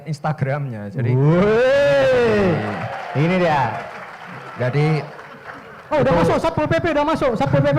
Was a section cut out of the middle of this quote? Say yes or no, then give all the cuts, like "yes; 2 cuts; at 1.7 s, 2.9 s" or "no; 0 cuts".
no; 0 cuts